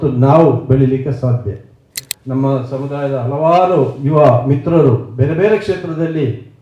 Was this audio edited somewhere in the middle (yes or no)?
yes